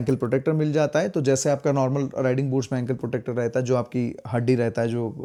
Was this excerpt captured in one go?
yes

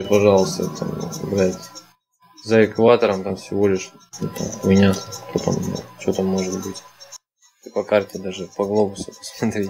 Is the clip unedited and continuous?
yes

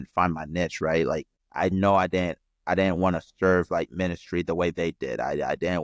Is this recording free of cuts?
no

